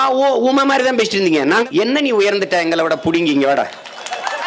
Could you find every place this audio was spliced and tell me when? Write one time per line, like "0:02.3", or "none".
0:01.7